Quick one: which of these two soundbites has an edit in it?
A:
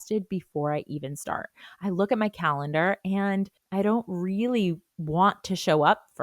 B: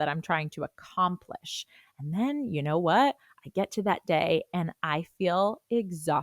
A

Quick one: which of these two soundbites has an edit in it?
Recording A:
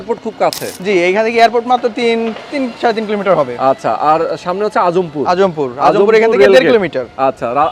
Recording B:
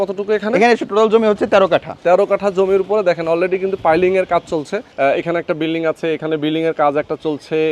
B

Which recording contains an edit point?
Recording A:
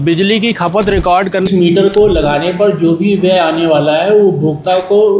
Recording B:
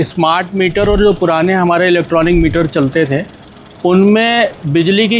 A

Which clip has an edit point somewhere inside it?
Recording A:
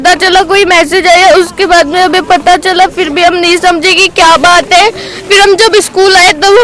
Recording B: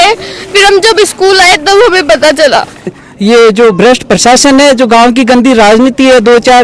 B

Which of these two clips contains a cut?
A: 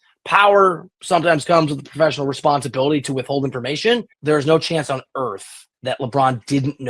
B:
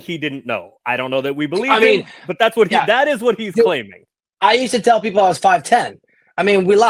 A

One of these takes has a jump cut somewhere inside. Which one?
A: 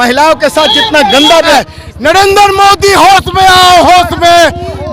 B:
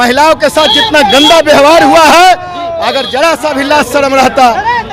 A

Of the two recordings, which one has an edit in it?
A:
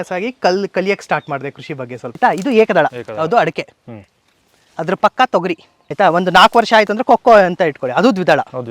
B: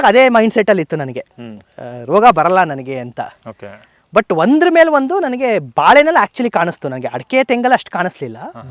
A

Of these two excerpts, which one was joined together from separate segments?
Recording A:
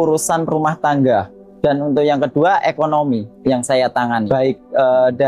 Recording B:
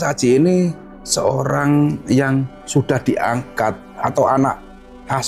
A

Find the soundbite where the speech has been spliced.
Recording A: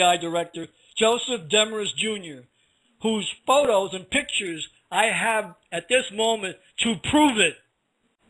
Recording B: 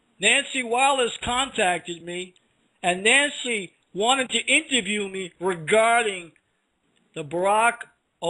A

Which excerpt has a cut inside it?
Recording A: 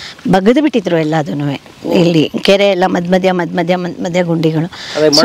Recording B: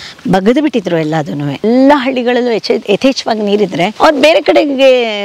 B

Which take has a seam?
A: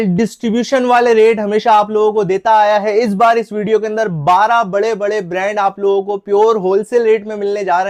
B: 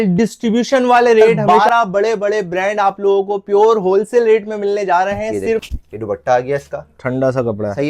B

